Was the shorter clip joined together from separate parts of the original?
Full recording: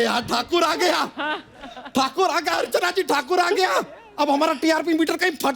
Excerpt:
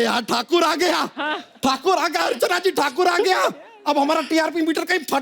yes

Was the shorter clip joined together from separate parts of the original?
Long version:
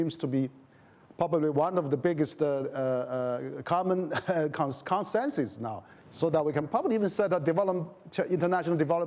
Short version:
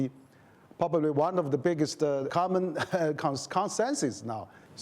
yes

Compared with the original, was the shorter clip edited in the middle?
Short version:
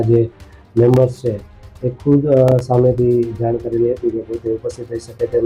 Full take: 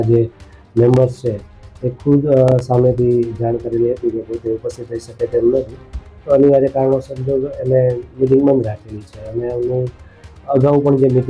no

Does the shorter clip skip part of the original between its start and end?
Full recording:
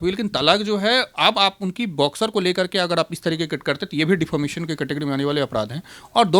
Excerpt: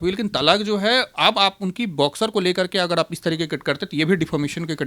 no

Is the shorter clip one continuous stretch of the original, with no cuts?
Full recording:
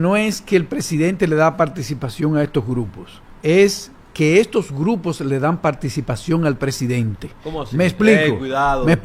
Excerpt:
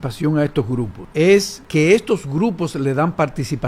no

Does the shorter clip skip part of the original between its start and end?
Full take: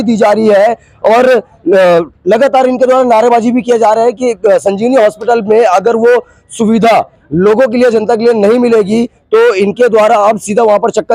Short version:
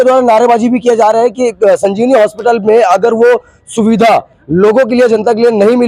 no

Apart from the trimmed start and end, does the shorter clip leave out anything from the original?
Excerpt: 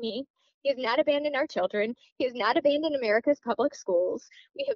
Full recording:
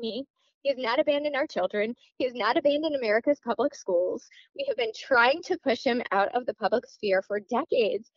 no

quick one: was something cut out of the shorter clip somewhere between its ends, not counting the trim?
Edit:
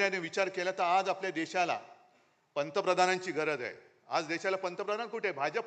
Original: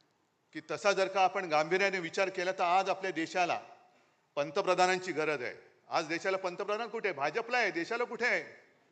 no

